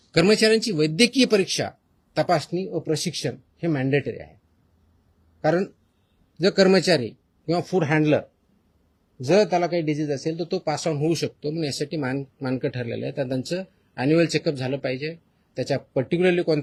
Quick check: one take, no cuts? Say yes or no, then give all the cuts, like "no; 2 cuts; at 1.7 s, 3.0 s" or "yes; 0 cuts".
yes; 0 cuts